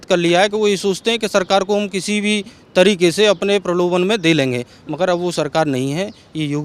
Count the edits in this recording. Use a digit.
0